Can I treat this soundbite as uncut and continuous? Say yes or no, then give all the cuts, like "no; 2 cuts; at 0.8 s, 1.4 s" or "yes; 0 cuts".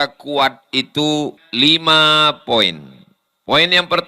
no; 1 cut; at 1.4 s